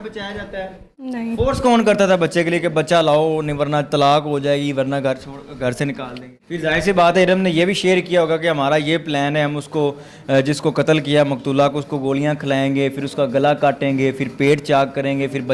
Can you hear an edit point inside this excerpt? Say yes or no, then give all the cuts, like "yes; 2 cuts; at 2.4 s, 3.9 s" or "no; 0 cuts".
yes; 2 cuts; at 1.1 s, 6.4 s